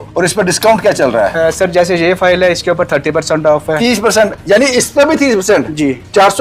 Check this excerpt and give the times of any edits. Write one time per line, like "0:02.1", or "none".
none